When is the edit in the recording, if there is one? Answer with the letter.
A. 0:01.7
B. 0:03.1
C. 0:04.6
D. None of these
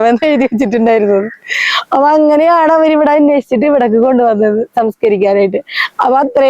D